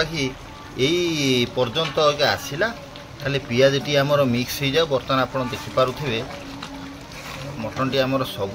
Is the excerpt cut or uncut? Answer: uncut